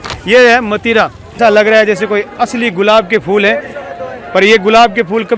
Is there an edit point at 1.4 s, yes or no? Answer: yes